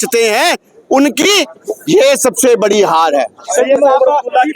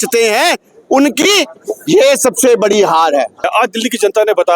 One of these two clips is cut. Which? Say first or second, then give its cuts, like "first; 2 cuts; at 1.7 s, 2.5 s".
second; 1 cut; at 3.4 s